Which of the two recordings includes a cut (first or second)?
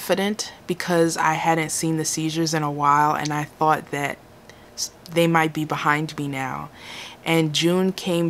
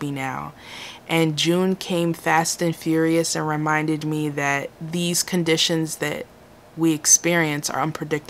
second